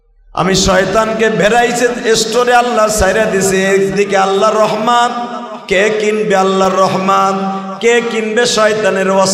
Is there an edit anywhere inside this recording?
no; 0 cuts

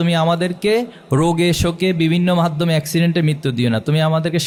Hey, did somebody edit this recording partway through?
no; 0 cuts

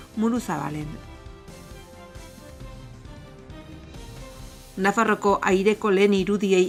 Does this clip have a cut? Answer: no; 0 cuts

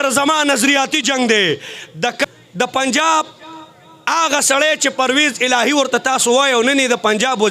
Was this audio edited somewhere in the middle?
yes; 1 cut; at 2.2 s

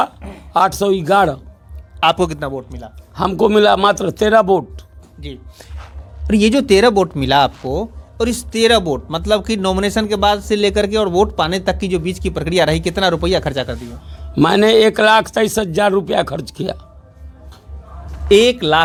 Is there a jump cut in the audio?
no; 0 cuts

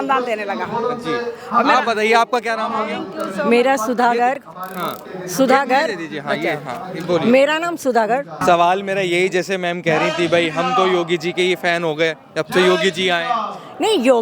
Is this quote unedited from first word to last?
yes; 0 cuts

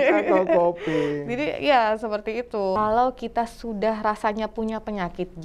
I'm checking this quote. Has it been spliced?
yes; 1 cut; at 2.8 s

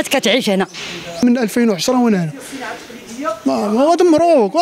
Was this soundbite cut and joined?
yes; 1 cut; at 1.2 s

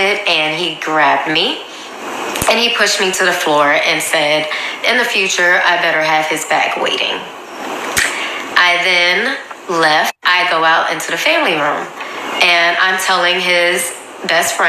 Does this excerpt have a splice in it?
no; 0 cuts

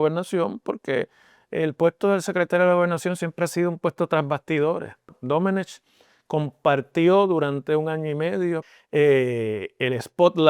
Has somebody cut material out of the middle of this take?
yes; 2 cuts; at 5.2 s, 8.7 s

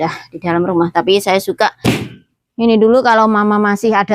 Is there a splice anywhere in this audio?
yes; 1 cut; at 1.9 s

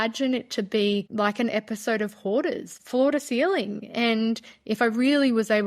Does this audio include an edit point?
yes; 2 cuts; at 1.1 s, 2.7 s

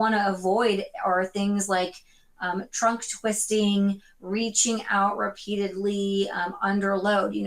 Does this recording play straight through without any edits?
yes; 0 cuts

